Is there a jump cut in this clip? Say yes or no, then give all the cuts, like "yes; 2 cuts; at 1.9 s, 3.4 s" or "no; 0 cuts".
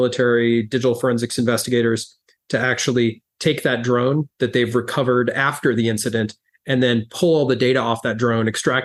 no; 0 cuts